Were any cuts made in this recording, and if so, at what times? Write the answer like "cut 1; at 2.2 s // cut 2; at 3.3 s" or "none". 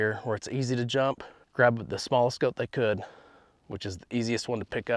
cut 1; at 1.4 s